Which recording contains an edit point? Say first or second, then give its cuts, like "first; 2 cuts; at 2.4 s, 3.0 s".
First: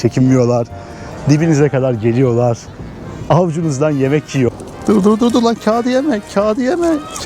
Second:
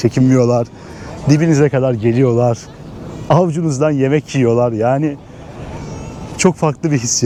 first; 1 cut; at 4.5 s